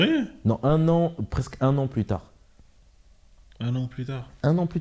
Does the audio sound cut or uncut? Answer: uncut